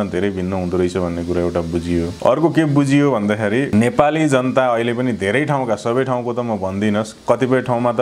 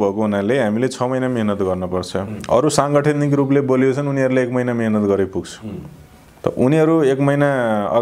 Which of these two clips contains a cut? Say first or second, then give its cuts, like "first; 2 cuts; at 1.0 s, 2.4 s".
first; 2 cuts; at 2.1 s, 3.7 s